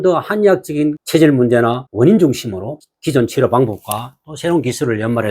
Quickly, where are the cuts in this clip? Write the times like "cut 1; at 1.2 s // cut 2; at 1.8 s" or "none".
cut 1; at 1.0 s // cut 2; at 1.8 s // cut 3; at 2.8 s